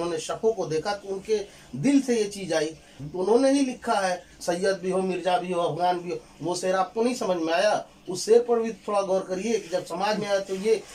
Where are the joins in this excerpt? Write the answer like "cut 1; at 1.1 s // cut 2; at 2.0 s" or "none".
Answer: cut 1; at 2.9 s // cut 2; at 4.3 s